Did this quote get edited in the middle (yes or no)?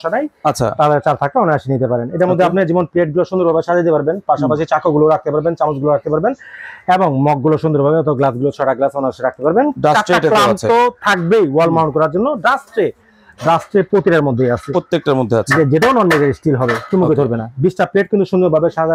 no